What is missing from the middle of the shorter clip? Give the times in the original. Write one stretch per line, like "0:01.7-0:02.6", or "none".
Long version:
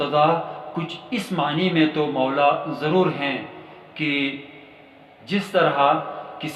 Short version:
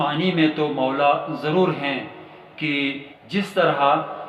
0:04.5-0:05.1